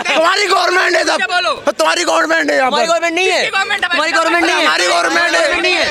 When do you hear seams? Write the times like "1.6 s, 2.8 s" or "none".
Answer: none